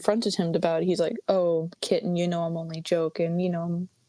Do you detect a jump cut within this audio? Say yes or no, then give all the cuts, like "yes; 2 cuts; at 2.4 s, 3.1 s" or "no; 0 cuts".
no; 0 cuts